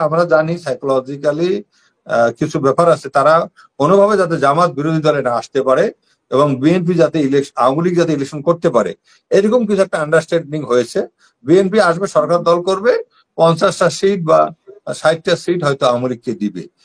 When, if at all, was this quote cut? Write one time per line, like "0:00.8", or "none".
none